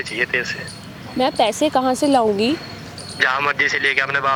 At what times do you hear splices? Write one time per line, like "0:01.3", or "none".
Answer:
none